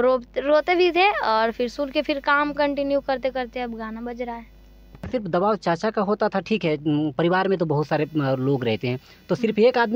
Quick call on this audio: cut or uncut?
cut